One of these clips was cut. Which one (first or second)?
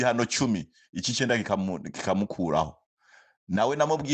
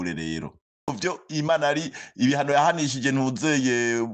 second